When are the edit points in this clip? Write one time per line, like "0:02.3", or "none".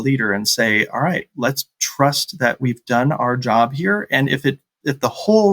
0:01.3